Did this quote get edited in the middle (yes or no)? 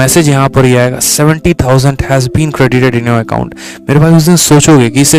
no